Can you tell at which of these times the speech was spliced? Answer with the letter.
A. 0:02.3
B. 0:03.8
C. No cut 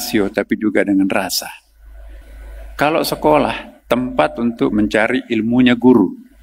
A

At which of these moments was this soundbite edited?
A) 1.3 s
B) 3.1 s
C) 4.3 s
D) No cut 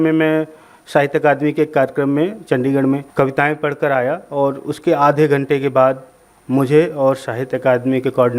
B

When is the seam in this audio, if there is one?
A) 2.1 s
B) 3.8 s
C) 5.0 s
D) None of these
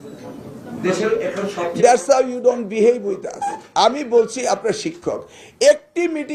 D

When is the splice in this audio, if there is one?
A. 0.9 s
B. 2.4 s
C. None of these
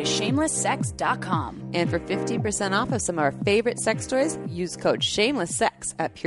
C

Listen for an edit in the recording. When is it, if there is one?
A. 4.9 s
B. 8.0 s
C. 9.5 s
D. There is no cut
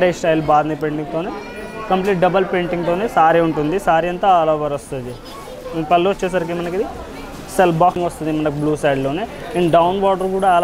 B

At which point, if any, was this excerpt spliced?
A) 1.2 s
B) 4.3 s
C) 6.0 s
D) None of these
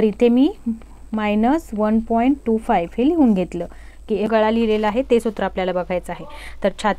B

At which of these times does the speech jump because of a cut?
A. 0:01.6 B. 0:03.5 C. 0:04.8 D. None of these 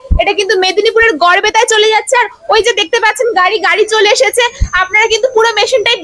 D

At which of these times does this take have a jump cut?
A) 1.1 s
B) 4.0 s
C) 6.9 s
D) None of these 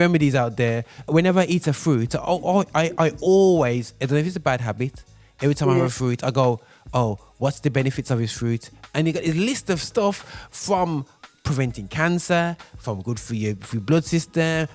A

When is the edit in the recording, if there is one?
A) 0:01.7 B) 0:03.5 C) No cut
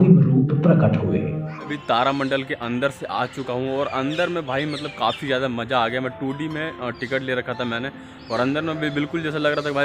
A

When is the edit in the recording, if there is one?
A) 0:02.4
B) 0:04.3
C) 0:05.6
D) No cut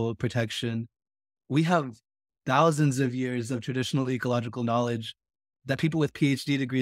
C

